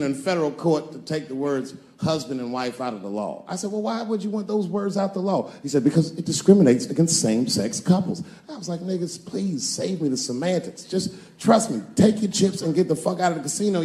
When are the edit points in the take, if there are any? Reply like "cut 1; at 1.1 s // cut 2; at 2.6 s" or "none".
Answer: none